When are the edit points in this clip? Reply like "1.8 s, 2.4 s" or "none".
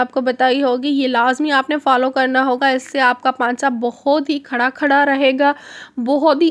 none